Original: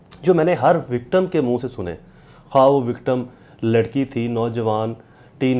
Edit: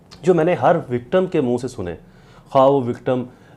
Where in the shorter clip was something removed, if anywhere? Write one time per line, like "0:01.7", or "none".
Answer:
none